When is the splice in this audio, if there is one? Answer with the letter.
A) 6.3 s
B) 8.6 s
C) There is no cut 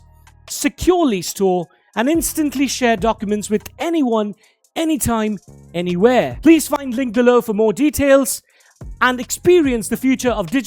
A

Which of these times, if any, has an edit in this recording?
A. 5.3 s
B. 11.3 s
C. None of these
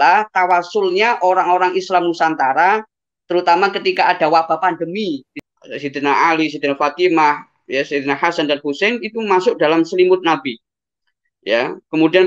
A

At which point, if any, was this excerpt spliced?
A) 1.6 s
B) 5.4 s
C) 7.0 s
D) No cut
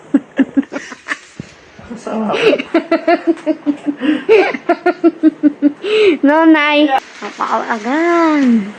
C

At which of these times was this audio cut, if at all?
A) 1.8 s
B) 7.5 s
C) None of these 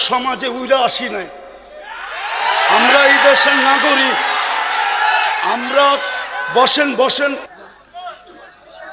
B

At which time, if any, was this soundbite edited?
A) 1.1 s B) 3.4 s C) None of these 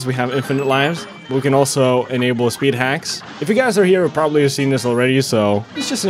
C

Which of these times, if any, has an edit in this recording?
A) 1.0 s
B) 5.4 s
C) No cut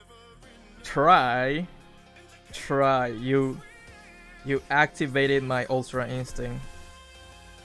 C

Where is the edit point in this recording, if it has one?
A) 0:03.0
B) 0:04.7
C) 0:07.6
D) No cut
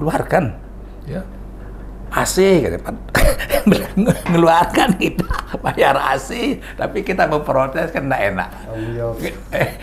D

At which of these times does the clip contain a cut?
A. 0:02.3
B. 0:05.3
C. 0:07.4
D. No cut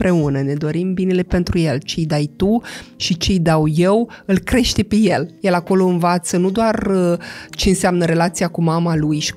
B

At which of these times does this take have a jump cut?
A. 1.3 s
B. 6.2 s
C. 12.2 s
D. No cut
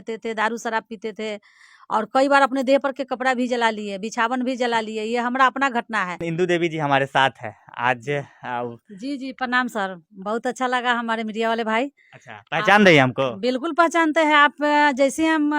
B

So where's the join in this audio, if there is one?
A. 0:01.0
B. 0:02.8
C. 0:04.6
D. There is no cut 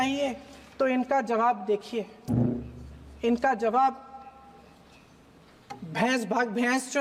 D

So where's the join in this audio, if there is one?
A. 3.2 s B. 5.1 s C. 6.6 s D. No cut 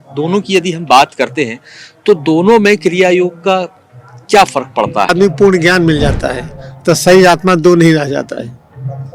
B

